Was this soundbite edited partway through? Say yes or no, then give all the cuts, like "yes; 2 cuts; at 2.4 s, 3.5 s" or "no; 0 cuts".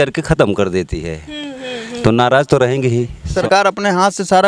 yes; 1 cut; at 3.3 s